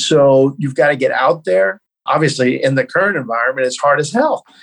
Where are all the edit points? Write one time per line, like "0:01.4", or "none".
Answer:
0:02.0

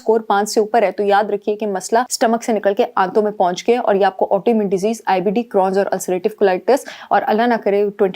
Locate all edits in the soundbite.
0:02.1

